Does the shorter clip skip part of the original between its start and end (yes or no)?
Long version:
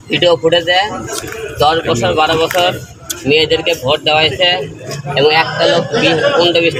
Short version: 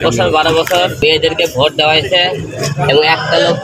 yes